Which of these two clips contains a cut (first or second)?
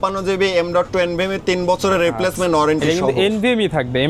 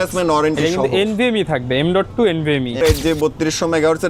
second